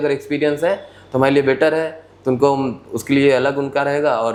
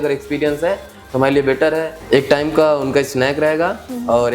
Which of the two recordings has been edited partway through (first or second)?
second